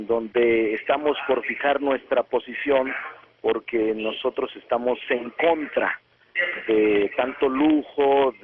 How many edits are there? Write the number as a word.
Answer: one